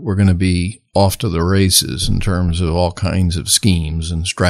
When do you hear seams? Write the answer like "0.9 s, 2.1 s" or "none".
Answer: none